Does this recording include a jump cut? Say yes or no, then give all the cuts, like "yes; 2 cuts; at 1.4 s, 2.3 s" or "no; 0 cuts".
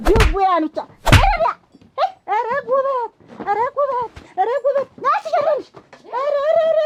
no; 0 cuts